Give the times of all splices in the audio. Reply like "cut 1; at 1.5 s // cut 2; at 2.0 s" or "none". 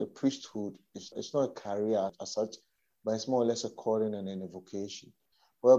cut 1; at 1.1 s // cut 2; at 2.2 s